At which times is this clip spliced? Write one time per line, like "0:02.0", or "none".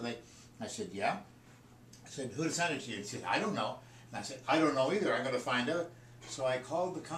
none